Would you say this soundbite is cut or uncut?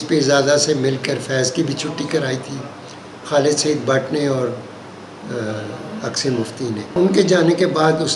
cut